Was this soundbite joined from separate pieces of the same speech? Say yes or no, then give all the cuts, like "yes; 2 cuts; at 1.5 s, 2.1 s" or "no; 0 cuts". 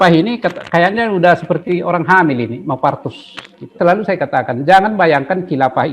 yes; 1 cut; at 3.7 s